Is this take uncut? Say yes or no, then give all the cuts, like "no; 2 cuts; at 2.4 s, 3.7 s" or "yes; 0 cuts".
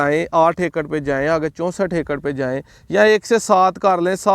yes; 0 cuts